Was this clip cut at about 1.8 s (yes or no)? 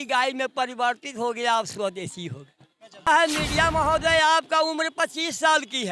no